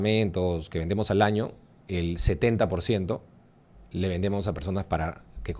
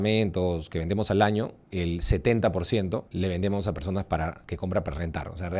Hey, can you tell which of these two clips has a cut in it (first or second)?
second